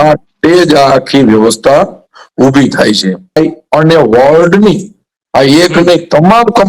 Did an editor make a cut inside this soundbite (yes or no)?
yes